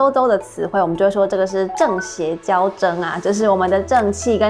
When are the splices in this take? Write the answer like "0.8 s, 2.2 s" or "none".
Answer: none